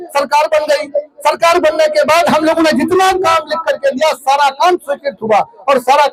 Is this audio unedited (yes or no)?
yes